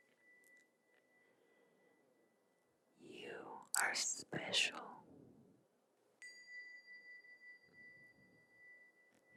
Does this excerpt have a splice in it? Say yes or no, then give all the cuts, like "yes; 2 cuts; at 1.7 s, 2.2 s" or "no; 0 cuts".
no; 0 cuts